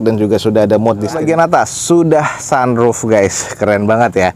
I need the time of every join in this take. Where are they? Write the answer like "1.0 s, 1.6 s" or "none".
1.2 s